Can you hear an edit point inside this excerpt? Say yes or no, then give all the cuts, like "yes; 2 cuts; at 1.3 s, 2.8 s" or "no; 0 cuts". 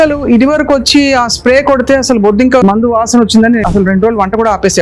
yes; 2 cuts; at 2.6 s, 3.6 s